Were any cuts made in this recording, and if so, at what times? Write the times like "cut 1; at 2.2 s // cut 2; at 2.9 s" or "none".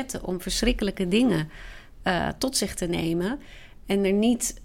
none